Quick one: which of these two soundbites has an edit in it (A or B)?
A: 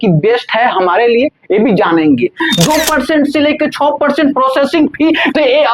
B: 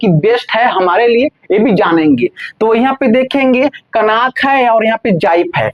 A